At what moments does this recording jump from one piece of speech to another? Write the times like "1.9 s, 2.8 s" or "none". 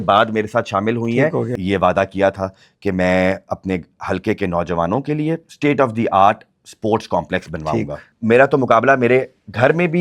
1.5 s, 5.5 s, 8.1 s